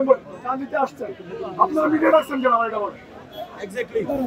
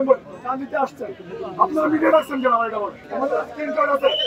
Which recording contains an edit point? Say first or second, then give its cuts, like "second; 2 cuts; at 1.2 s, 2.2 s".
second; 1 cut; at 3.0 s